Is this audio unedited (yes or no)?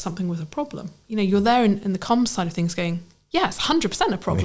no